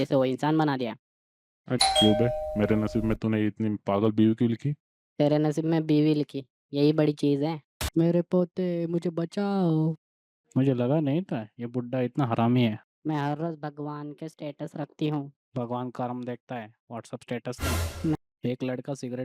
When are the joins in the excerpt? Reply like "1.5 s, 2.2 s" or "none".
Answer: 1.7 s, 7.7 s, 12.9 s, 18.2 s